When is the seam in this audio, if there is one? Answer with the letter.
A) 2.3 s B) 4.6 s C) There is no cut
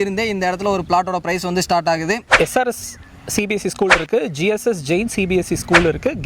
A